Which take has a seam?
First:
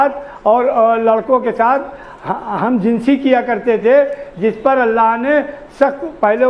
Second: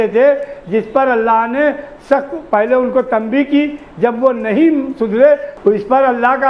second; 1 cut; at 5.5 s

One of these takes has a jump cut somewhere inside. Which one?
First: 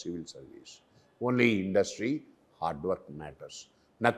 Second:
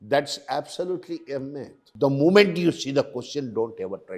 second; 1 cut; at 1.8 s

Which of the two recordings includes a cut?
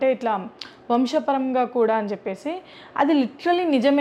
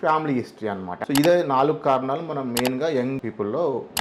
second; 1 cut; at 0.9 s

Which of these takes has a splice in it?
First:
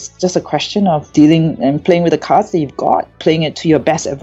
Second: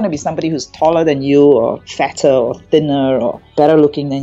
first; 1 cut; at 3.2 s

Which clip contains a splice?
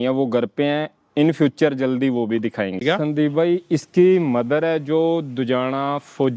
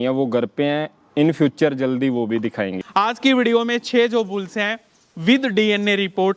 first; 1 cut; at 2.8 s

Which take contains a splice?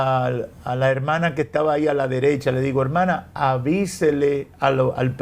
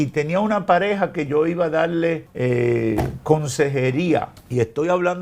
second; 2 cuts; at 2.3 s, 4.4 s

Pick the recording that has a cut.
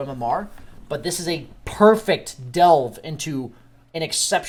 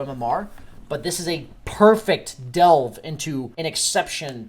second; 1 cut; at 3.5 s

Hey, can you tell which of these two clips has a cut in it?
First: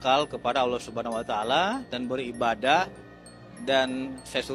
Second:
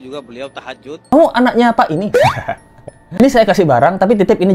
second; 1 cut; at 1.0 s

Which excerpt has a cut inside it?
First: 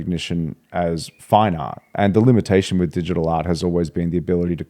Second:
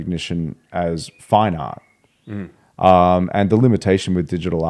first; 1 cut; at 1.9 s

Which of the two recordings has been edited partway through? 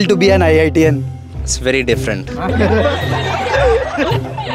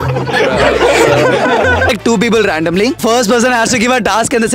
second; 2 cuts; at 1.9 s, 3.0 s

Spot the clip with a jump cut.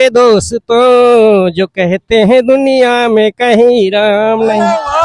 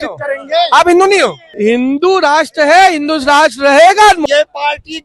second; 2 cuts; at 1.4 s, 4.2 s

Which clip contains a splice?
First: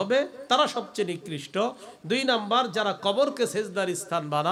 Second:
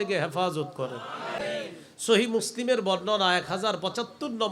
second; 1 cut; at 1.4 s

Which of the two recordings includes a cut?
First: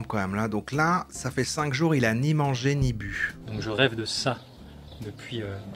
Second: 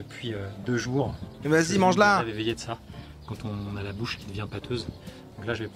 first; 1 cut; at 3.4 s

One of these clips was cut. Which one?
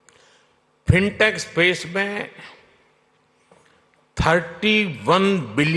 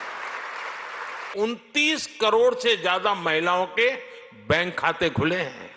second; 1 cut; at 1.3 s

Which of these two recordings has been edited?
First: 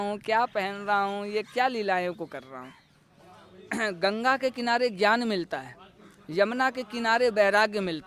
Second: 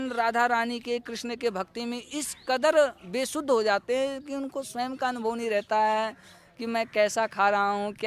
first; 1 cut; at 3.1 s

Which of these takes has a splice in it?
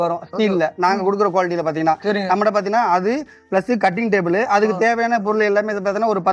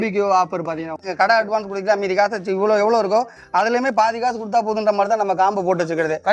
second; 1 cut; at 1.0 s

